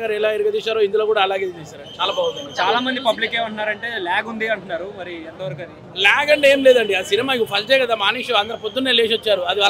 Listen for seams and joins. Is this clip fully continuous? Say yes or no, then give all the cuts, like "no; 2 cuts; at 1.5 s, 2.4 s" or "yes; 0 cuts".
yes; 0 cuts